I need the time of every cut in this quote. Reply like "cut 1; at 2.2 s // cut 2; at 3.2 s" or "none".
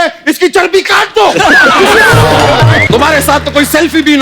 cut 1; at 2.8 s